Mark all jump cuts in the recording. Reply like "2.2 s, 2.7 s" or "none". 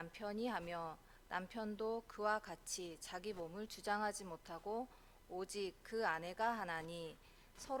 none